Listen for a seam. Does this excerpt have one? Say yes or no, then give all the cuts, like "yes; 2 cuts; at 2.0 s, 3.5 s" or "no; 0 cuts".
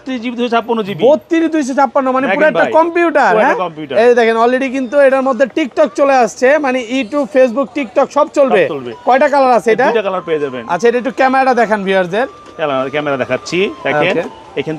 no; 0 cuts